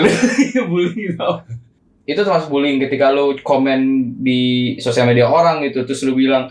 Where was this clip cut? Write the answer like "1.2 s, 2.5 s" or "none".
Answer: 1.7 s